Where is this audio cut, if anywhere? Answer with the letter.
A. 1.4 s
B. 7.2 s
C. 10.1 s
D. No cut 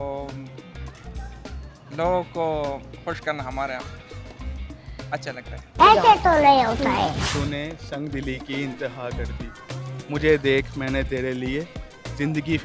B